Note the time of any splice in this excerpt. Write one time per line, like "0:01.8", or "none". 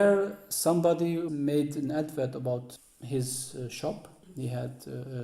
0:01.3
0:02.7
0:04.3